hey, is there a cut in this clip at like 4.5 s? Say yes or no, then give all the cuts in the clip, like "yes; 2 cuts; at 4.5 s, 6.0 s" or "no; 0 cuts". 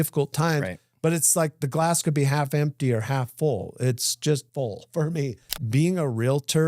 yes; 2 cuts; at 4.5 s, 5.4 s